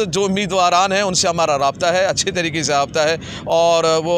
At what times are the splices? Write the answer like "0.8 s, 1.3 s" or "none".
none